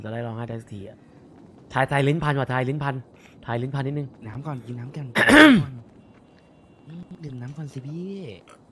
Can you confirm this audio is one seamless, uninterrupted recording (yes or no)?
yes